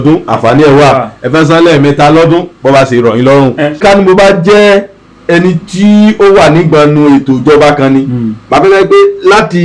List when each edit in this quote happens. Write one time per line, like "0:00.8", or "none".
0:03.8